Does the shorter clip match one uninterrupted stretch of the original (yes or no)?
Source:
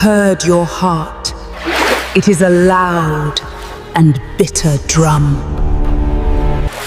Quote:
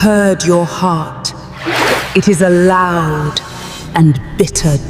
yes